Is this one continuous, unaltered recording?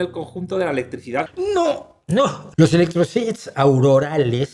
no; 2 cuts; at 1.3 s, 2.4 s

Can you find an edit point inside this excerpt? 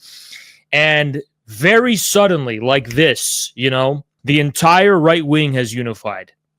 yes; 1 cut; at 4.1 s

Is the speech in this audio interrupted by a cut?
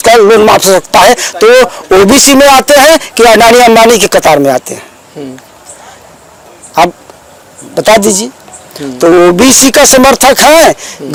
no; 0 cuts

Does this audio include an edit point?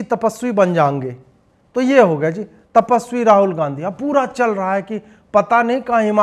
no; 0 cuts

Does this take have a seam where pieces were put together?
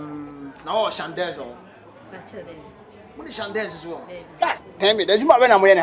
no; 0 cuts

